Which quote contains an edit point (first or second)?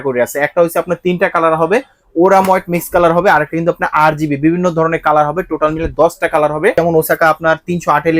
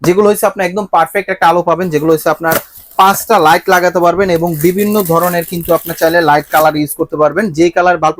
first